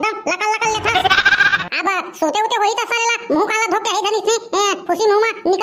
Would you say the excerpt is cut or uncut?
uncut